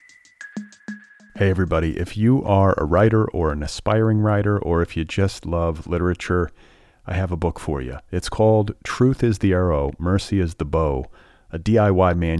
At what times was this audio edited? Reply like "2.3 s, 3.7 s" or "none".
1.0 s